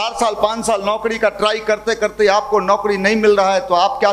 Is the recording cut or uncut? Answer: uncut